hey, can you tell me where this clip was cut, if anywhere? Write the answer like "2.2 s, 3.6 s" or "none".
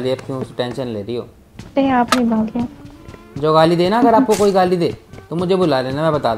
none